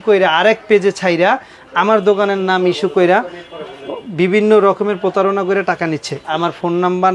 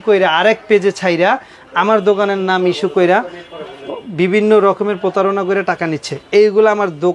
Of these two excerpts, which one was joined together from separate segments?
first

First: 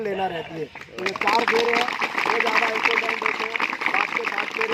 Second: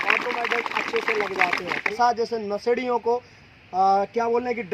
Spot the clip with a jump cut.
second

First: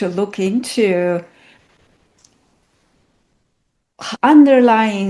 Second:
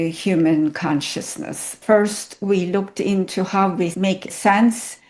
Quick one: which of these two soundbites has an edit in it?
second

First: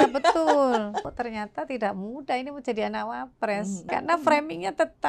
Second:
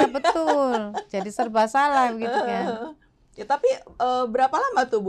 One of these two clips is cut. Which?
first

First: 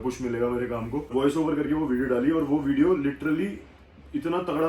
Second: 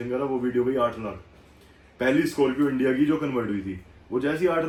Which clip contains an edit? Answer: first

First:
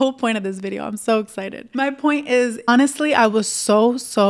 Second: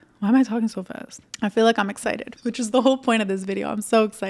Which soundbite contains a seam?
first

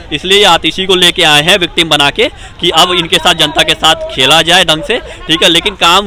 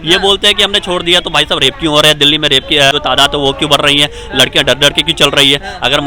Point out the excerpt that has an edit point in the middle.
second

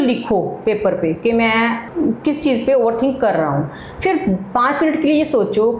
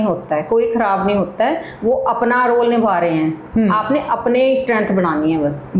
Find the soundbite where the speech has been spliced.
first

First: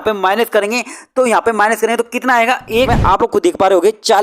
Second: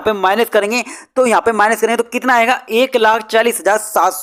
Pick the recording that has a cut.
first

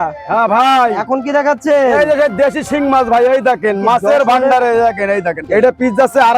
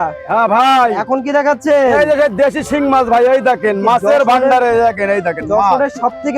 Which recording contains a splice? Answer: first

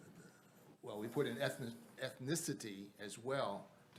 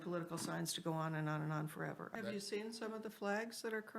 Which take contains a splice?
second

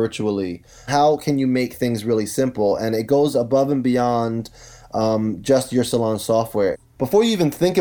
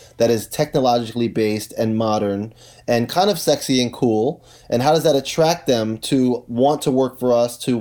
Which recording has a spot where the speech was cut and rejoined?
first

